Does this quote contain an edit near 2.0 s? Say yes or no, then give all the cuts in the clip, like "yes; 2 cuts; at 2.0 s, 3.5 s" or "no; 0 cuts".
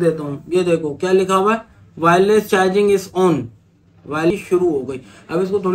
no; 1 cut; at 4.3 s